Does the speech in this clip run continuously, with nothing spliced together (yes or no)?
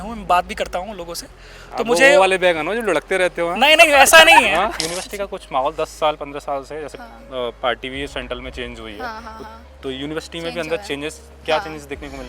no